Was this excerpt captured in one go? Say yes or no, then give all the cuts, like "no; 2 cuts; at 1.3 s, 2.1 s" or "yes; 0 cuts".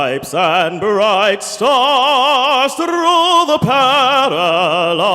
yes; 0 cuts